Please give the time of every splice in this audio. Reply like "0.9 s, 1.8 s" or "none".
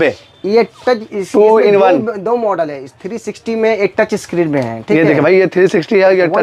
none